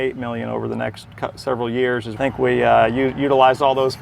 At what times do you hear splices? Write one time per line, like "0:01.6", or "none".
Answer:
0:02.1